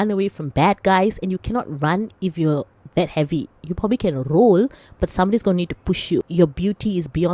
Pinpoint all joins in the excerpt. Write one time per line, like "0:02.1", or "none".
0:06.2